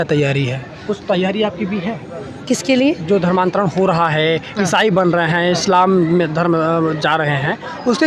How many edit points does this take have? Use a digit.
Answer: 0